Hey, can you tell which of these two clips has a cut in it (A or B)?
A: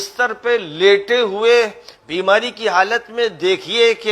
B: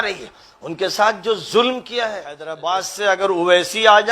B